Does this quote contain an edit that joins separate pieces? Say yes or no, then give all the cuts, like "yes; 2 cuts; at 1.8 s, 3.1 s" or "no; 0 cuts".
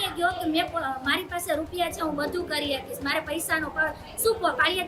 no; 0 cuts